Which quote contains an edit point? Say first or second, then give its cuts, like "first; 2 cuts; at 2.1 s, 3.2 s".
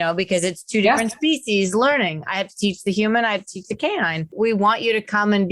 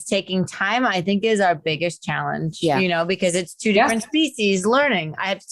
first; 1 cut; at 4.3 s